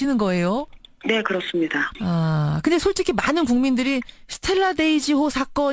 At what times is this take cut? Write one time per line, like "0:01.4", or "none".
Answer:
0:02.3